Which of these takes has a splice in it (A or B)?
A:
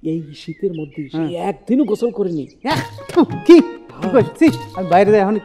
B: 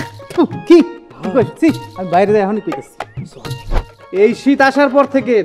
B